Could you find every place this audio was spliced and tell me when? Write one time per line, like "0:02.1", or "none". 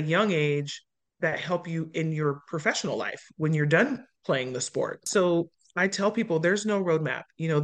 0:05.1